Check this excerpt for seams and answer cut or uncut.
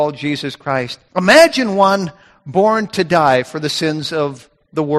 cut